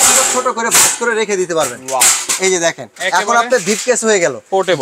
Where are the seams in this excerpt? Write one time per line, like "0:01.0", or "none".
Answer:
none

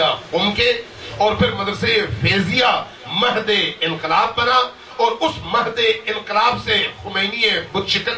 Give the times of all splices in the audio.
0:06.3

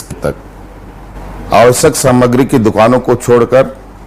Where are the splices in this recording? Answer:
0:01.1

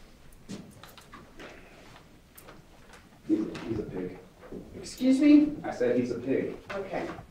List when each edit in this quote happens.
none

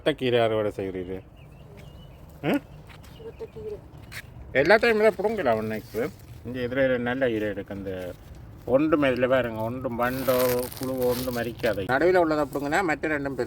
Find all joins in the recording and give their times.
0:11.9

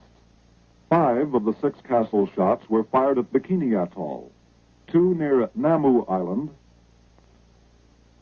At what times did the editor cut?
none

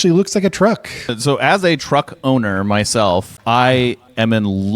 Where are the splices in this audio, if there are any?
0:01.2

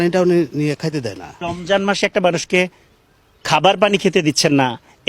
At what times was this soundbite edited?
0:01.3

